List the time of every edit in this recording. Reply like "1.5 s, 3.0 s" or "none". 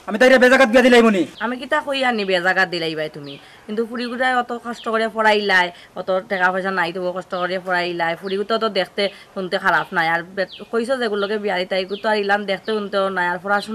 none